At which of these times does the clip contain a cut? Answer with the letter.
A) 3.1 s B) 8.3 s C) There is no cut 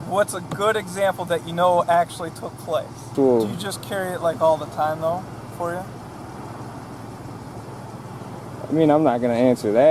A